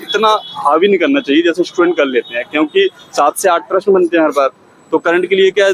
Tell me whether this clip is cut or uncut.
uncut